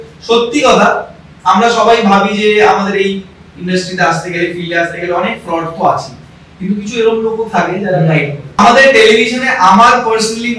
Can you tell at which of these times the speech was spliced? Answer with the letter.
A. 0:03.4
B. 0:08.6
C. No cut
B